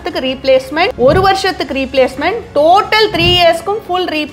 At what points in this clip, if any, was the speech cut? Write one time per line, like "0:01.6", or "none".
0:00.9